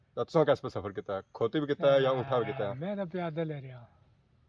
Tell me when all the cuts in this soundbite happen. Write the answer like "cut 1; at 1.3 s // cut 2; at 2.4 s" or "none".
none